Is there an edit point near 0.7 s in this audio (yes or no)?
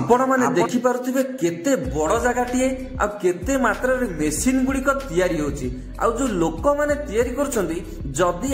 no